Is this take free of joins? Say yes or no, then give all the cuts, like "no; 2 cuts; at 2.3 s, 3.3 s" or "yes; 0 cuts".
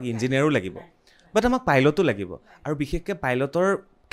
yes; 0 cuts